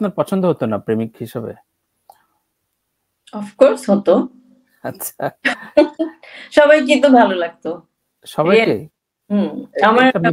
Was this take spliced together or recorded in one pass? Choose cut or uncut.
uncut